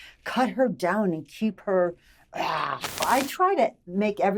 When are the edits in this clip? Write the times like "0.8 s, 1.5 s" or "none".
3.0 s